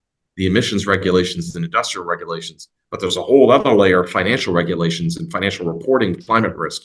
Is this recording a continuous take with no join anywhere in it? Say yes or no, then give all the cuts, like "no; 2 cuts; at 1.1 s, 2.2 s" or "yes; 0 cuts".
yes; 0 cuts